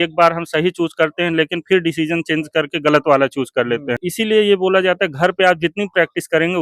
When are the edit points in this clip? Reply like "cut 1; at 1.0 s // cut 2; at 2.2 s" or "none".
cut 1; at 4.1 s